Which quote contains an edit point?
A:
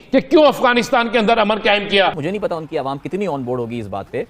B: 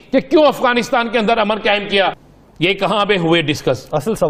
A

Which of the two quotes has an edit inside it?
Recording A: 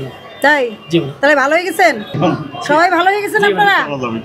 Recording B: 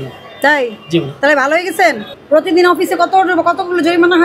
B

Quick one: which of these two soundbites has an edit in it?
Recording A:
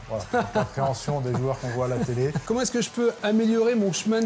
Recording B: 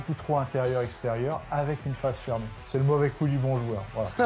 B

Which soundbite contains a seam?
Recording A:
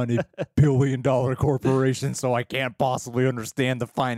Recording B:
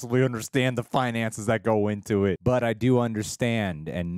B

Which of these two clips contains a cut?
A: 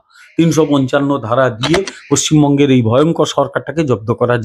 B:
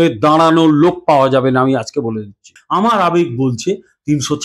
B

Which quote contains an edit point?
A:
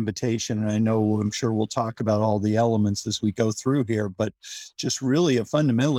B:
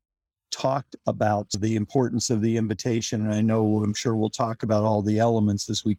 B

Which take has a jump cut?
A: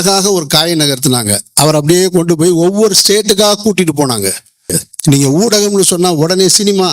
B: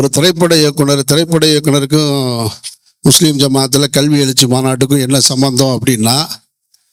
A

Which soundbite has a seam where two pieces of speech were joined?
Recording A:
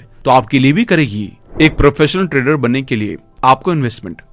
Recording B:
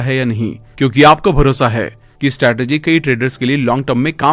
A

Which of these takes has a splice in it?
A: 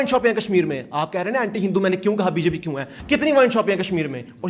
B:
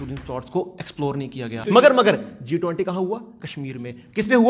B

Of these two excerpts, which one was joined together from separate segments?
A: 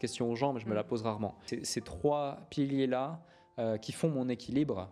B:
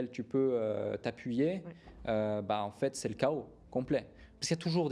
A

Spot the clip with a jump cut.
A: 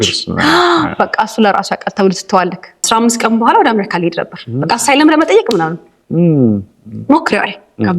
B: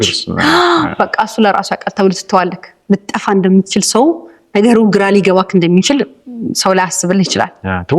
A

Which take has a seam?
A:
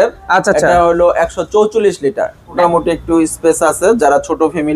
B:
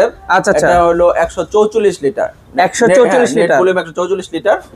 A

